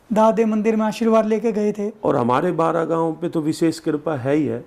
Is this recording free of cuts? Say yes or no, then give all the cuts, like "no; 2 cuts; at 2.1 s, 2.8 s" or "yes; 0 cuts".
no; 1 cut; at 1.9 s